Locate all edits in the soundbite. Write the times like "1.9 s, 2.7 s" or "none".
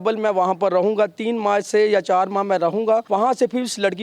3.0 s